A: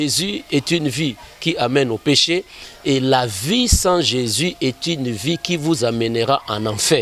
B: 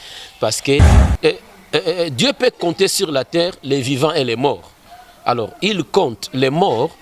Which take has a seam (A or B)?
B